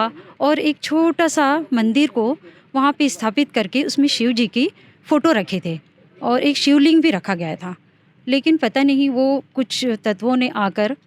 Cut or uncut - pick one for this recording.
uncut